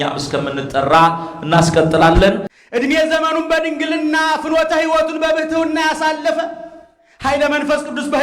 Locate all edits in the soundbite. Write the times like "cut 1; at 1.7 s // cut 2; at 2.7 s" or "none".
cut 1; at 2.6 s